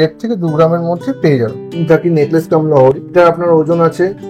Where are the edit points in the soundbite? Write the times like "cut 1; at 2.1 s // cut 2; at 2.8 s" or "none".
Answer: cut 1; at 1.6 s // cut 2; at 3.1 s